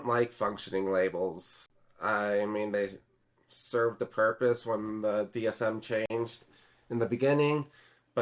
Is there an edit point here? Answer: no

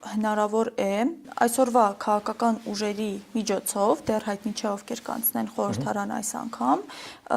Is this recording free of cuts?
no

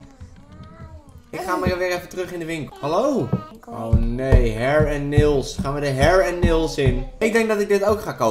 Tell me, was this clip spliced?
yes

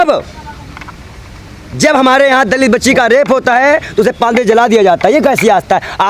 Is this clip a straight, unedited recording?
yes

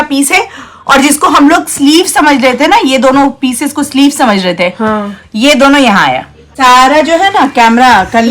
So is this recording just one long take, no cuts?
no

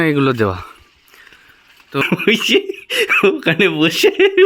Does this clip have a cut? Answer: yes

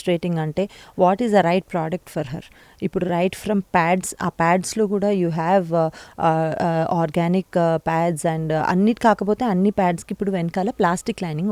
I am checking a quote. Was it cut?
no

